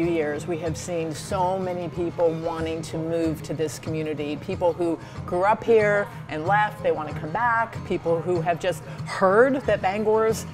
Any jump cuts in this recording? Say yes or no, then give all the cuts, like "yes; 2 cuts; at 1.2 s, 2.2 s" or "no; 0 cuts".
no; 0 cuts